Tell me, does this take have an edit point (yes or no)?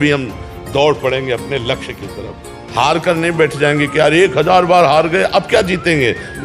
no